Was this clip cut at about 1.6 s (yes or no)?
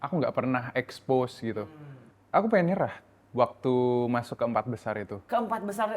yes